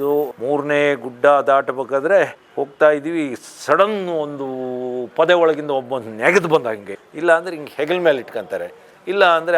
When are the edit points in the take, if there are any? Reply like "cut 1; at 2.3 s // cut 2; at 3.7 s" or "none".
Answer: cut 1; at 6.9 s